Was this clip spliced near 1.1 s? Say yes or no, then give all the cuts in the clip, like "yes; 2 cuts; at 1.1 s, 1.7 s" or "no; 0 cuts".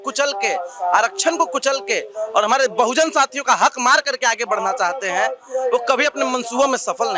no; 0 cuts